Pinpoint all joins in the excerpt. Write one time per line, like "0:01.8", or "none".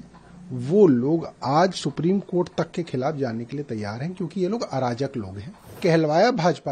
0:05.8